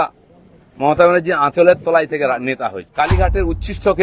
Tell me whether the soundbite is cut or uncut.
cut